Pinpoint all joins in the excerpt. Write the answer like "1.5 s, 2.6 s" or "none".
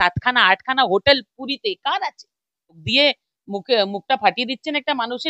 2.8 s

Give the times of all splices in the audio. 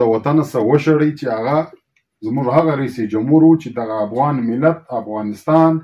none

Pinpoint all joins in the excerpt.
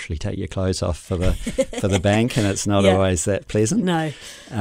none

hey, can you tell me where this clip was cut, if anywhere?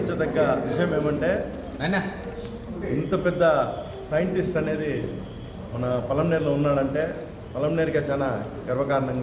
none

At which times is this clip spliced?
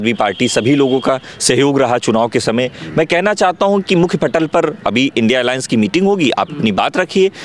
none

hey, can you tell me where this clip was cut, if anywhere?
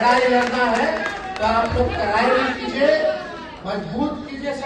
none

